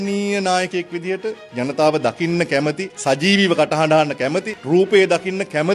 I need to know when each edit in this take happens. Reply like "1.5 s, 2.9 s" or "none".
2.9 s, 4.5 s

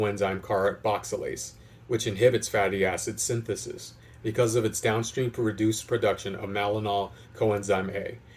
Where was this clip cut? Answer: none

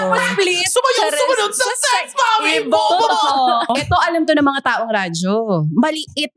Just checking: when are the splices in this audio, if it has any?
3.7 s

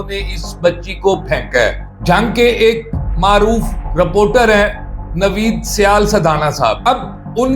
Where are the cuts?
1.9 s

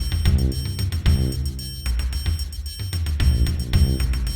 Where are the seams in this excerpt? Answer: 0.9 s

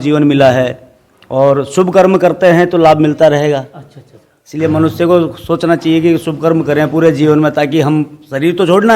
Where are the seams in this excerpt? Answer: none

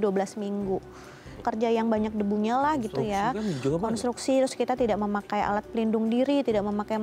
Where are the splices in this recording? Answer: 1.4 s

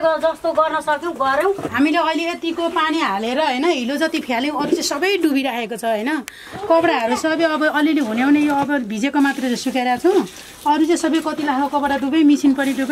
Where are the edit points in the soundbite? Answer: 1.7 s

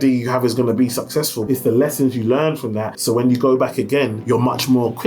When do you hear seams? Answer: 1.4 s, 2.9 s, 4.2 s

